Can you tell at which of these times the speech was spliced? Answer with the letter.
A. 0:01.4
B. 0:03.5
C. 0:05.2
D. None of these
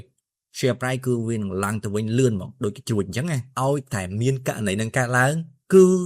B